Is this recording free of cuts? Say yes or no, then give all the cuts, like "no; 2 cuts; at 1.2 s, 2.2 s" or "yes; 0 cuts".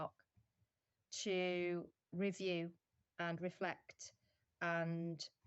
no; 1 cut; at 1.0 s